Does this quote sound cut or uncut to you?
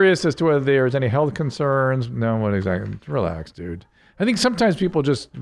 uncut